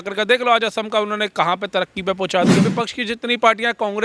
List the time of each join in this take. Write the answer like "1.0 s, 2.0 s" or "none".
2.7 s